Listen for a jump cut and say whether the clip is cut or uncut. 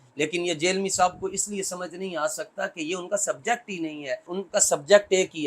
cut